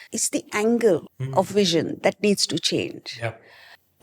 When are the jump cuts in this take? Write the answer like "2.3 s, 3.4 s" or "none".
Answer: 1.2 s